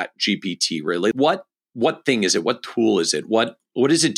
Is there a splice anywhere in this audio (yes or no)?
yes